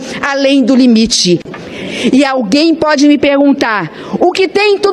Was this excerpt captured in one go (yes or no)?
no